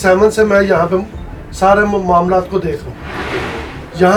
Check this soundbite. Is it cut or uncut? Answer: uncut